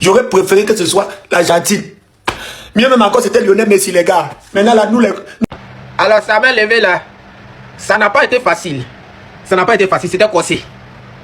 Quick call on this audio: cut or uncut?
cut